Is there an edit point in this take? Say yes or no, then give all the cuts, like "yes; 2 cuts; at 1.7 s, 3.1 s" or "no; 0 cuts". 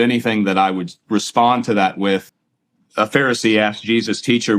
yes; 1 cut; at 2.4 s